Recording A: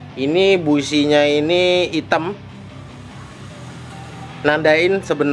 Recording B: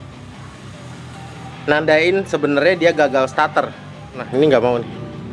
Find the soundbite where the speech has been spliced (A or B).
B